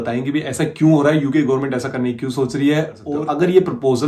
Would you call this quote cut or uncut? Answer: cut